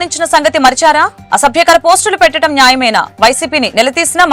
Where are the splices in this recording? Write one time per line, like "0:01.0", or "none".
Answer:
none